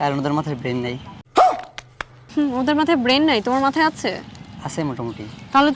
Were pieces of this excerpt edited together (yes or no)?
no